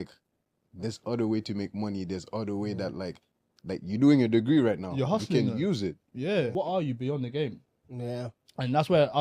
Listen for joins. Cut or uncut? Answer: cut